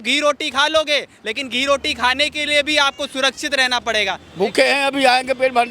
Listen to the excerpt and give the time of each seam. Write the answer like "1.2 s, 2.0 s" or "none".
4.2 s